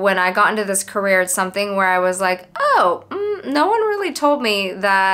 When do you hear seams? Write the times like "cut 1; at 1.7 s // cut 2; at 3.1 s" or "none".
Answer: none